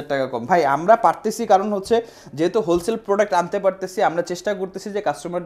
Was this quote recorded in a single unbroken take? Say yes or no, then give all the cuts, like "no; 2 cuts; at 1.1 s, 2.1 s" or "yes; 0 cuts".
yes; 0 cuts